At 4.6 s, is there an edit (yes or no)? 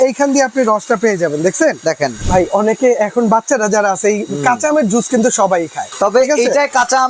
no